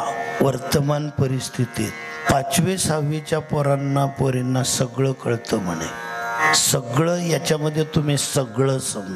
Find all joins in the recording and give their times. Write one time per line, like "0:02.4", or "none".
0:02.3
0:06.4